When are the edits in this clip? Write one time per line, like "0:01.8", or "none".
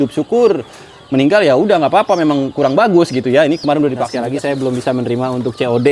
0:04.1

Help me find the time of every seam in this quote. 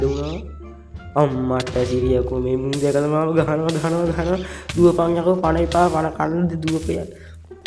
none

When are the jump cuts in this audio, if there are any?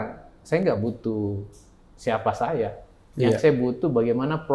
none

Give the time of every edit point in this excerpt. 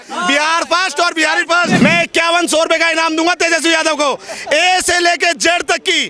0:01.8

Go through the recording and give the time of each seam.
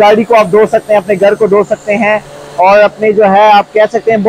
none

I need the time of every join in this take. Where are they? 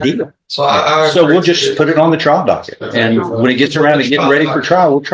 none

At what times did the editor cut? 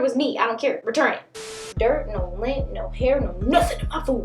0:01.7

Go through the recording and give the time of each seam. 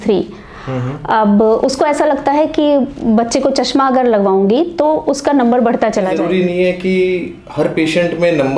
0:06.2

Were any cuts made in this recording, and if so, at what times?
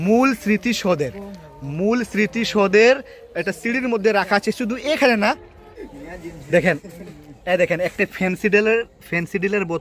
0:05.5

